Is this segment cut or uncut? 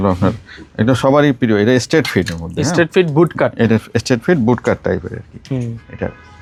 uncut